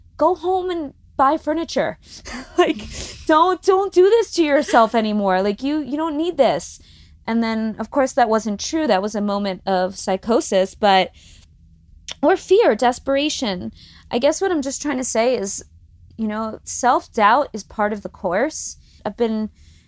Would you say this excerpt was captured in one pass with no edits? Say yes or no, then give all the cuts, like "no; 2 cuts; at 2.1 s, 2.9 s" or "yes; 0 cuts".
no; 1 cut; at 19.0 s